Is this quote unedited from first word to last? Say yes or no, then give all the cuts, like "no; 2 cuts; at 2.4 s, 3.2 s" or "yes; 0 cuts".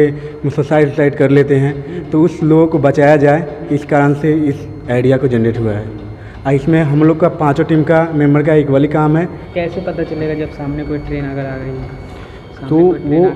no; 1 cut; at 9.4 s